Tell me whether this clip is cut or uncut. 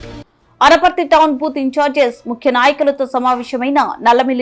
uncut